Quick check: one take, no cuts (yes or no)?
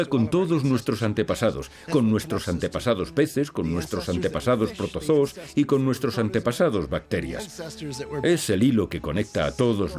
yes